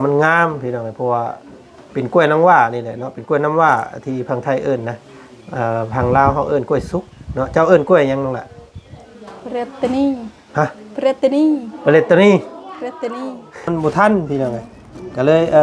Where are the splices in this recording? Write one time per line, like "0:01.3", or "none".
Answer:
0:13.6